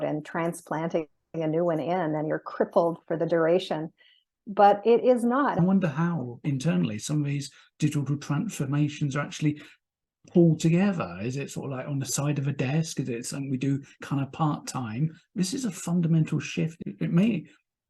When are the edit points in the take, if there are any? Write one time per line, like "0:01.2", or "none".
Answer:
0:05.5